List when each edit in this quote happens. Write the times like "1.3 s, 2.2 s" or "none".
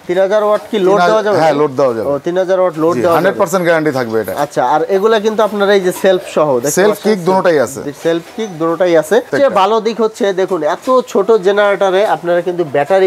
9.3 s